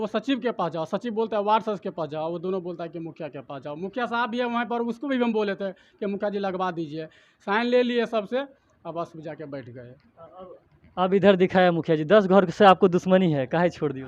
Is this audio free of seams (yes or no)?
yes